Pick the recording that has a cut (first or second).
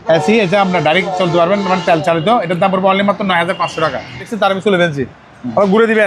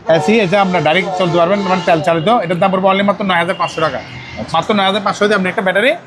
first